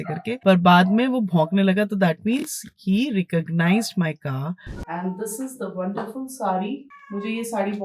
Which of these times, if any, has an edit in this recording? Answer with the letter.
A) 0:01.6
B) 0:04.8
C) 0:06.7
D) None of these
B